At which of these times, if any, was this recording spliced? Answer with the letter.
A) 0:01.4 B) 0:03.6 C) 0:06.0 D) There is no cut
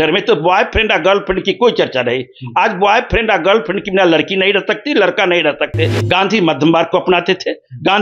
C